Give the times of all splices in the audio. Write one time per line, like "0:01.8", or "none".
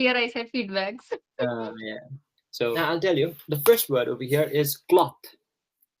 0:02.7